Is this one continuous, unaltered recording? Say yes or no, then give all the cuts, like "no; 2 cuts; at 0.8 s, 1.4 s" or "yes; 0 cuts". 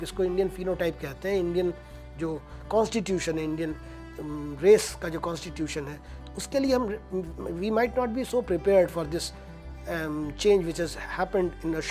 yes; 0 cuts